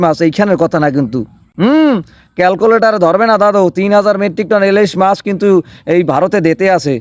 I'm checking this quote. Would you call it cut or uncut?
uncut